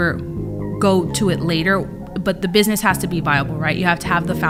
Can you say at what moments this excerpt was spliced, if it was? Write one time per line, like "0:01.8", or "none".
none